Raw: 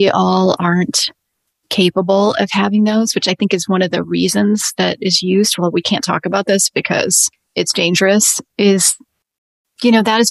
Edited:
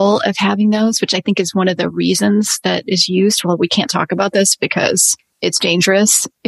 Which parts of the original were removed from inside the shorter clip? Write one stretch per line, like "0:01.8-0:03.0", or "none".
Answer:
none